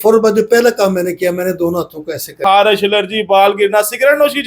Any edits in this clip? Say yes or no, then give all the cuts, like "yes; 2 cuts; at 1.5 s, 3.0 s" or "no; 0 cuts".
yes; 1 cut; at 2.4 s